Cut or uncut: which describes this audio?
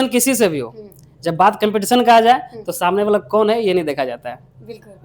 uncut